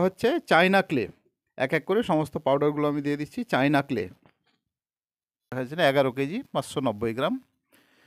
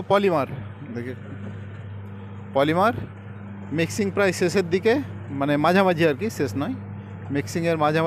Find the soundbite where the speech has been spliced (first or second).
first